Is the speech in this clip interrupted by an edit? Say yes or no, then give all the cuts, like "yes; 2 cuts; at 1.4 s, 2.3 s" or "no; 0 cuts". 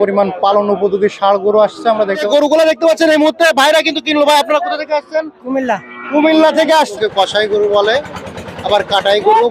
yes; 2 cuts; at 2.1 s, 6.9 s